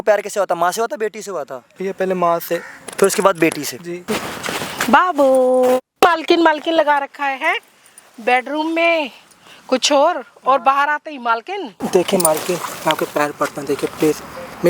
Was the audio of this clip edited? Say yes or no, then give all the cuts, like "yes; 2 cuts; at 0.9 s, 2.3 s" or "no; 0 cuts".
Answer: yes; 4 cuts; at 1.6 s, 4.0 s, 5.9 s, 11.8 s